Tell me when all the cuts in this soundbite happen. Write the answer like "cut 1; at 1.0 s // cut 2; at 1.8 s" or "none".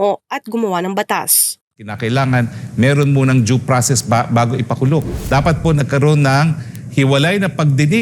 cut 1; at 5.2 s